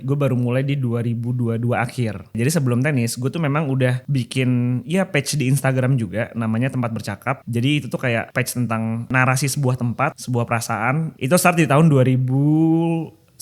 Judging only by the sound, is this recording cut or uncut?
cut